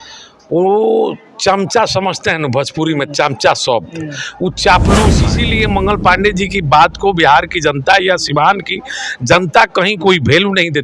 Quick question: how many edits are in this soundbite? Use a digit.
1